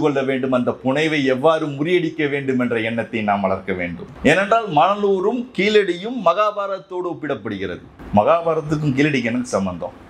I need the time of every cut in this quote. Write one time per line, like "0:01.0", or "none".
0:04.0
0:07.9